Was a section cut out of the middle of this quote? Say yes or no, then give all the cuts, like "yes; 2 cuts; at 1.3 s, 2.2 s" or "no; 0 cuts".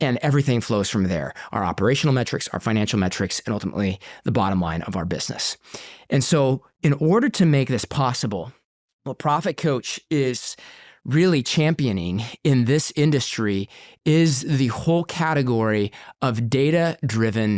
no; 0 cuts